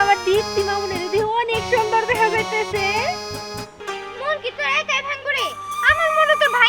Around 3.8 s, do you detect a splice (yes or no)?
yes